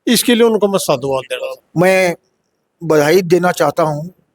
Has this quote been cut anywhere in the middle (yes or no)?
yes